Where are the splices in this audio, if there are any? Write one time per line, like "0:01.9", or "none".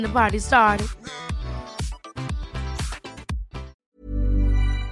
0:03.8